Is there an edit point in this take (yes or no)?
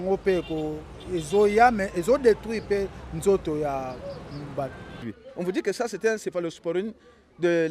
yes